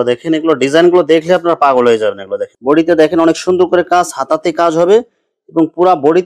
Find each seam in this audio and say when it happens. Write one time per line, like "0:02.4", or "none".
0:02.5